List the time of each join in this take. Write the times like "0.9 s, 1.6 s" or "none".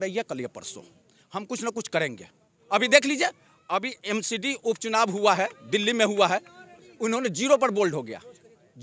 2.5 s